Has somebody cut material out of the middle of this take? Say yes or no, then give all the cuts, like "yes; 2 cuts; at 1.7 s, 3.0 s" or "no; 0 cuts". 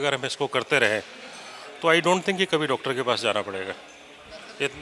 no; 0 cuts